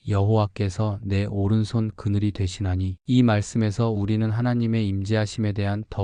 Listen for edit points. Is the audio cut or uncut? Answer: uncut